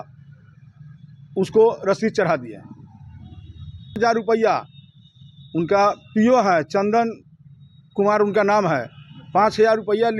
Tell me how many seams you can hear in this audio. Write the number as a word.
one